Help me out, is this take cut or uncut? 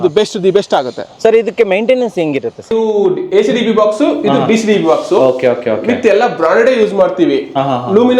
cut